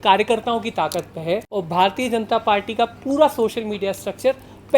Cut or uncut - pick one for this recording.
cut